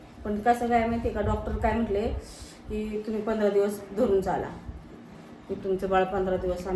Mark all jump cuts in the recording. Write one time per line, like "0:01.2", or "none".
none